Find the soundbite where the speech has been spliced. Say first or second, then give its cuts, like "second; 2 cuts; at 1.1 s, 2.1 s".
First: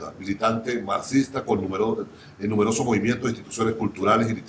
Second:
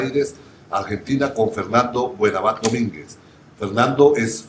first; 1 cut; at 2.4 s